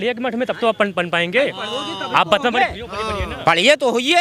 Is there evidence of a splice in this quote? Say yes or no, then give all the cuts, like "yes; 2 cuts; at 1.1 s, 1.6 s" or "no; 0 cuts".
no; 0 cuts